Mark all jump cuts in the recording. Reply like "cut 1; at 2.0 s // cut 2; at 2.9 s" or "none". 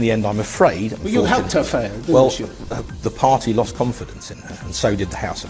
none